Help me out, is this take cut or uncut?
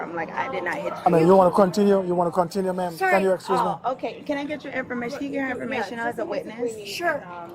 uncut